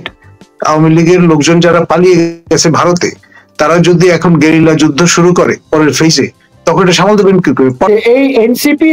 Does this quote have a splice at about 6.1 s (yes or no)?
no